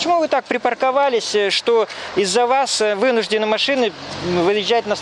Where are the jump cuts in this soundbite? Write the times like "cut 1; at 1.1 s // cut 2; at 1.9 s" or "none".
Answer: none